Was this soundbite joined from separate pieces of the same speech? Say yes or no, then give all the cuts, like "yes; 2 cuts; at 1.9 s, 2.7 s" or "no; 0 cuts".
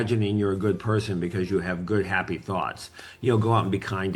no; 0 cuts